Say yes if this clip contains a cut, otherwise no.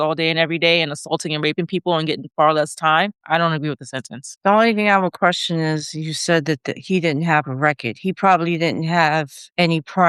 no